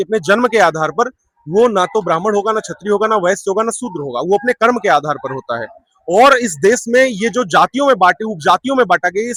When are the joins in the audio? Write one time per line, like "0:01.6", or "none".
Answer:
none